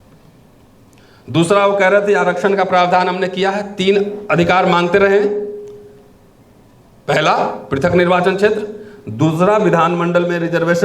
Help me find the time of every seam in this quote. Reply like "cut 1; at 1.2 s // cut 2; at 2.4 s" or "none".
none